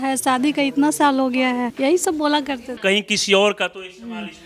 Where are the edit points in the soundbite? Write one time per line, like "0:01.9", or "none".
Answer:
0:01.7
0:02.8